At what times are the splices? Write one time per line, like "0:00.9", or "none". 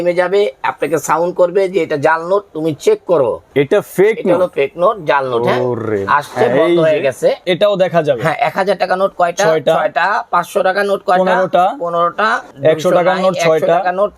0:03.5
0:07.4
0:12.5